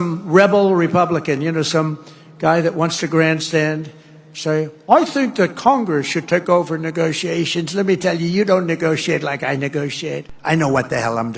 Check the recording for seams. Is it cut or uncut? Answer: cut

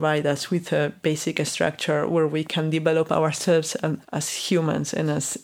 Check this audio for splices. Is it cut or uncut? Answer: cut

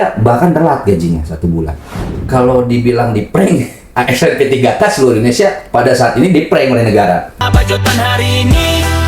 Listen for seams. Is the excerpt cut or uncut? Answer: cut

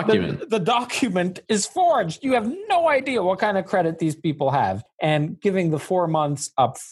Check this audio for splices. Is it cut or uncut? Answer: cut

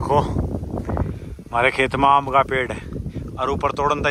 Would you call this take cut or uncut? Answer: uncut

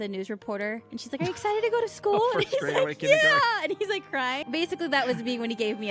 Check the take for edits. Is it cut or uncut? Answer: cut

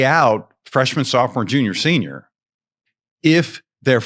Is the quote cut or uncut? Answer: cut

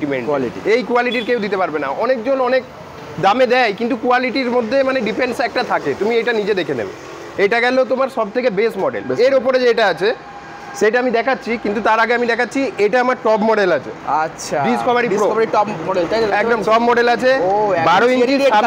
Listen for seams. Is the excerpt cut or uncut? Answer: uncut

